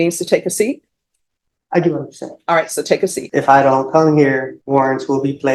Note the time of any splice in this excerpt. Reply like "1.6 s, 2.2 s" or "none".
3.2 s, 4.5 s